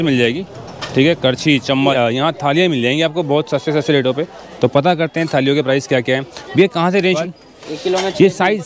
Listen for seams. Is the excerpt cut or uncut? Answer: cut